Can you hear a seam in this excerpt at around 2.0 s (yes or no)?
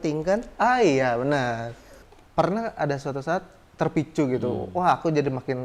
yes